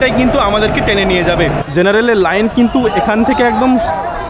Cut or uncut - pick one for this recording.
cut